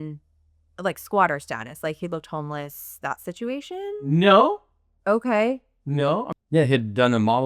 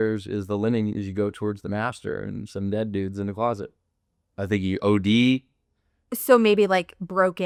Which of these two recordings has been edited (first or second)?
first